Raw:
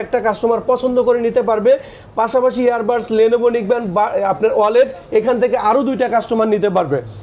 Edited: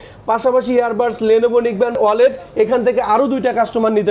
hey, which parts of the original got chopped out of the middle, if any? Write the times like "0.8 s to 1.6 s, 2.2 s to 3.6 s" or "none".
3.9 s to 4.5 s